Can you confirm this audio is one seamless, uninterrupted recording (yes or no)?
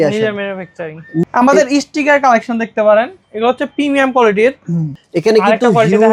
no